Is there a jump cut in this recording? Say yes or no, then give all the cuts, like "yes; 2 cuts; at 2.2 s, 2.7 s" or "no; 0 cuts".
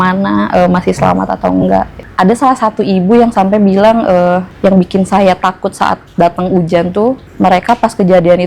yes; 3 cuts; at 2.0 s, 4.5 s, 7.3 s